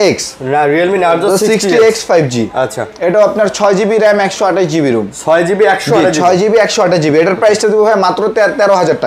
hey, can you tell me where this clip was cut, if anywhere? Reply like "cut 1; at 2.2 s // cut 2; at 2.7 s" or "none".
none